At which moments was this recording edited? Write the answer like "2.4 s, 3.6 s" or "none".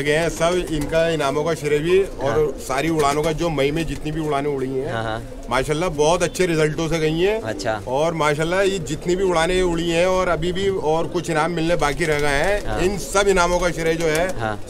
none